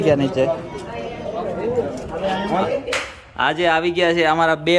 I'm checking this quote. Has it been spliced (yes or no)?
yes